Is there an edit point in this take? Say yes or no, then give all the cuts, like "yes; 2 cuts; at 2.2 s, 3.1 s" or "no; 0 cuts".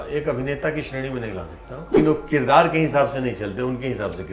yes; 1 cut; at 1.9 s